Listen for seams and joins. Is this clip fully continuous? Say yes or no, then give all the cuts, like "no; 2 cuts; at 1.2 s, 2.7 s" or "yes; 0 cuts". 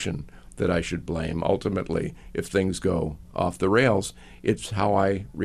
yes; 0 cuts